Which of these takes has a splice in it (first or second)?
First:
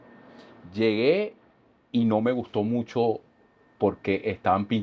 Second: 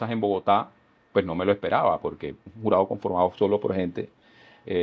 second